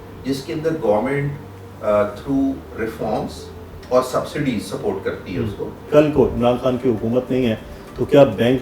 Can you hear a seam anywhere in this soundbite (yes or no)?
yes